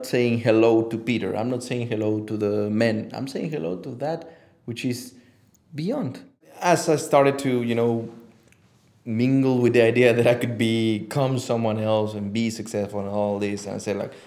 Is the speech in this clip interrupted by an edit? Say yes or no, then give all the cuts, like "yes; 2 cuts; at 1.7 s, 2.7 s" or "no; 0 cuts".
yes; 1 cut; at 6.4 s